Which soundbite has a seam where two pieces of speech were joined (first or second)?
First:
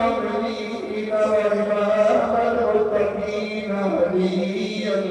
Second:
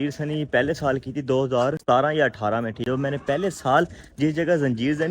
second